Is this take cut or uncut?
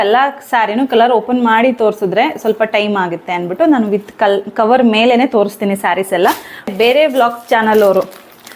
cut